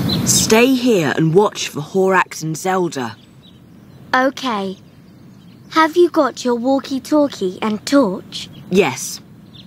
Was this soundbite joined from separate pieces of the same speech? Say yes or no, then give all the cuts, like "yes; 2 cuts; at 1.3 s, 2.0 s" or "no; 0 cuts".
no; 0 cuts